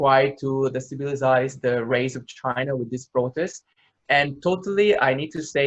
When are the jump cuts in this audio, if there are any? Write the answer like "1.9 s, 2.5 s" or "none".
none